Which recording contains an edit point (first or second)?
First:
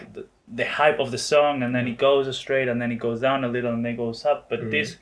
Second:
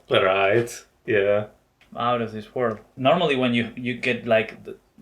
second